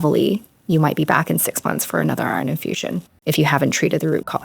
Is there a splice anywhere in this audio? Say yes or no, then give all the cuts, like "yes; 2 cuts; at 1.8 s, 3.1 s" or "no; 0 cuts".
yes; 1 cut; at 3.1 s